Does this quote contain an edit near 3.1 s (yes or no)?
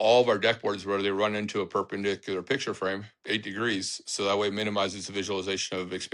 no